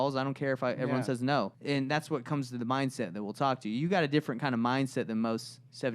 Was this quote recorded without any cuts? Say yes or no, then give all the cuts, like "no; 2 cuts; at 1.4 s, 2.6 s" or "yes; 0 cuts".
no; 1 cut; at 1.6 s